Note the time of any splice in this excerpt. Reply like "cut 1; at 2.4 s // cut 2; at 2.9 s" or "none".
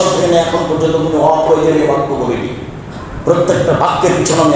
none